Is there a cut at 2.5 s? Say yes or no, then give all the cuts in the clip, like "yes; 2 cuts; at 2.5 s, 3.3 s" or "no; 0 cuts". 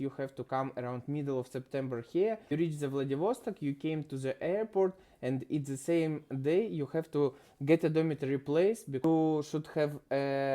yes; 2 cuts; at 2.5 s, 9.0 s